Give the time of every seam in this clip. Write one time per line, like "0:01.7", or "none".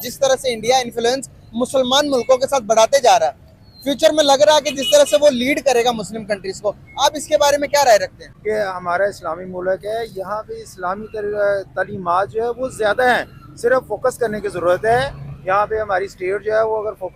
0:08.3